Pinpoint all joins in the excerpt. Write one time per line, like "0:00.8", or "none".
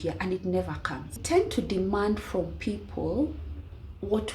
0:01.2